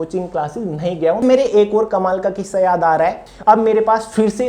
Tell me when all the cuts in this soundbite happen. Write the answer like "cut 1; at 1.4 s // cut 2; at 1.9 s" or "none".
cut 1; at 1.2 s // cut 2; at 3.2 s